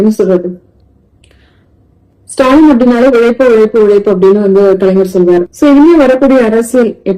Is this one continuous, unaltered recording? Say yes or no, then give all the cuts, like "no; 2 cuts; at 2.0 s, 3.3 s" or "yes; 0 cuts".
no; 1 cut; at 5.5 s